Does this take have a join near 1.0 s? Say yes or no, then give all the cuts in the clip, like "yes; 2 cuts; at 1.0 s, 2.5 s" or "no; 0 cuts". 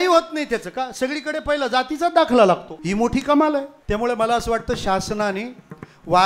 no; 2 cuts; at 2.7 s, 3.8 s